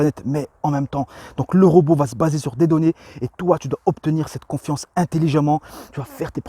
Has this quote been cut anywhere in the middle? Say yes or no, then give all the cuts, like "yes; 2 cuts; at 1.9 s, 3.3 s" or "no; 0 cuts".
no; 0 cuts